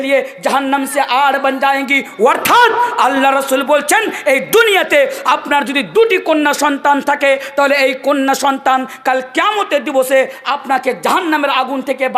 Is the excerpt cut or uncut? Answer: uncut